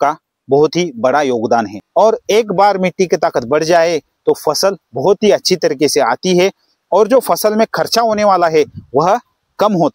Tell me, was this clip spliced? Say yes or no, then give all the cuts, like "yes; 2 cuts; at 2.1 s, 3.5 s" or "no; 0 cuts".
yes; 1 cut; at 1.8 s